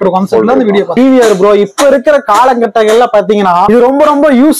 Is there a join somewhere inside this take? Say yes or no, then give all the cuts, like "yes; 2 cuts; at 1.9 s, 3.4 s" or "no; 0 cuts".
yes; 2 cuts; at 0.9 s, 3.7 s